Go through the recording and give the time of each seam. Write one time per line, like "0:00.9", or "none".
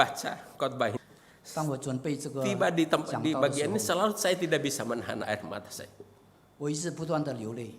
0:01.0